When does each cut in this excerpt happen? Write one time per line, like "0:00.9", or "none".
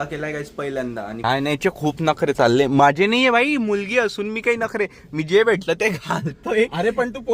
0:01.2